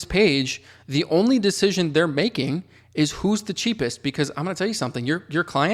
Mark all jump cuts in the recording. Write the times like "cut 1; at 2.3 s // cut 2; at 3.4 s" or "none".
none